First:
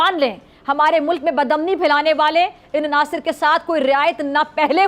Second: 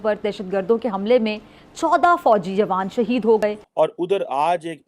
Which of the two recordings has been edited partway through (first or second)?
second